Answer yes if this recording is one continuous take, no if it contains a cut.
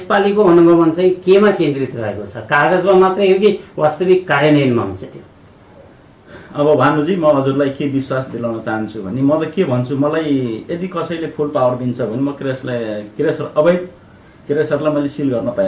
yes